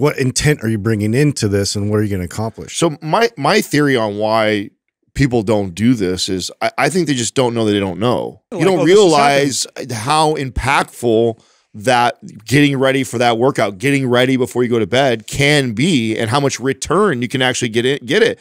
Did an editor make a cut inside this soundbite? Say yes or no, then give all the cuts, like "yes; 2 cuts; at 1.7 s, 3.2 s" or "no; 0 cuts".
yes; 1 cut; at 8.5 s